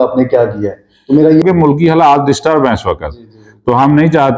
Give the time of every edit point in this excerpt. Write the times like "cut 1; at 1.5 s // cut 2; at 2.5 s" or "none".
cut 1; at 1.4 s